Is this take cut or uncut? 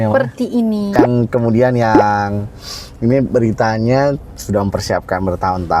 cut